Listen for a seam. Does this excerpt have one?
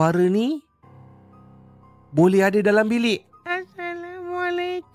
no; 0 cuts

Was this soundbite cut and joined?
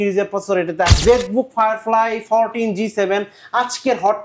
yes; 1 cut; at 1.0 s

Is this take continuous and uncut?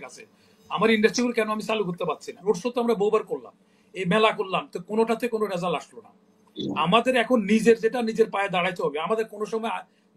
no; 1 cut; at 2.4 s

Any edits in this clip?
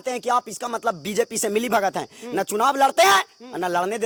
no; 0 cuts

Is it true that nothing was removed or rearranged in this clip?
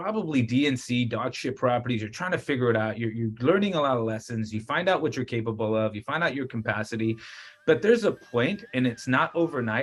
yes; 0 cuts

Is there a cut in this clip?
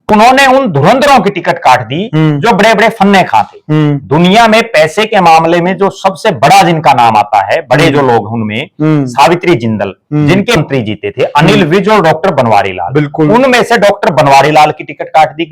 yes; 1 cut; at 10.6 s

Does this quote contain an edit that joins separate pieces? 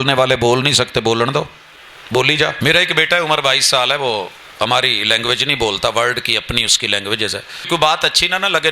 yes; 2 cuts; at 2.6 s, 7.7 s

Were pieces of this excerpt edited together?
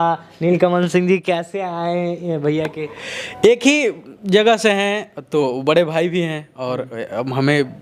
no; 0 cuts

